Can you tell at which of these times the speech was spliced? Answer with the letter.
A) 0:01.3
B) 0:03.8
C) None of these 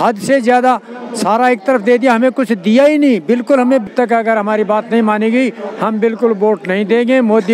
B